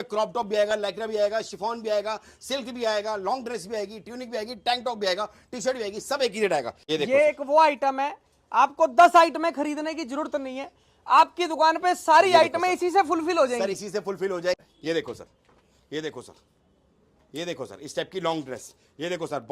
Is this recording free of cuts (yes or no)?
no